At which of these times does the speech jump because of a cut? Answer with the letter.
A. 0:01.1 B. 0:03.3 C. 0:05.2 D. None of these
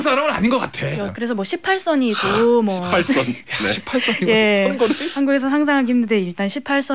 A